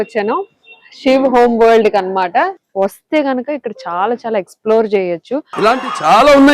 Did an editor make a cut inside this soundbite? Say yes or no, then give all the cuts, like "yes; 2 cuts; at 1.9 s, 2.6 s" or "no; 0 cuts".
yes; 1 cut; at 2.6 s